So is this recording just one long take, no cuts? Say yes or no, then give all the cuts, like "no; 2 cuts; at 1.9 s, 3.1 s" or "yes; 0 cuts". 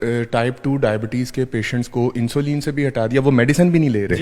yes; 0 cuts